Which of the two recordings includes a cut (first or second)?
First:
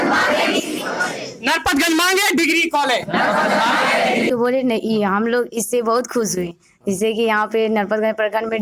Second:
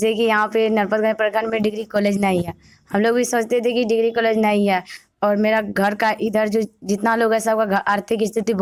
first